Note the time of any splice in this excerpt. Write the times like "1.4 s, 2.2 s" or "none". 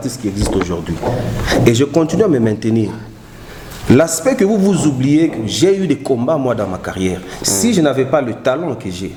none